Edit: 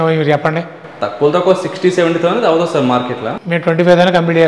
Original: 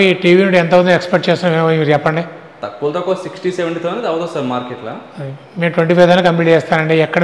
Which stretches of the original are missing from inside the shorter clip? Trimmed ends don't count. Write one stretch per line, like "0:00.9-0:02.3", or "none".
0:05.0-0:05.5